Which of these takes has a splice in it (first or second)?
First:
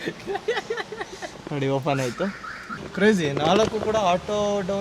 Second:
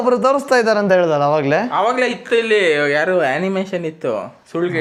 first